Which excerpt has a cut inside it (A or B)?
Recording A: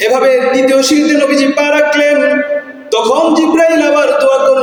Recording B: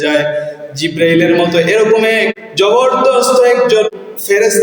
B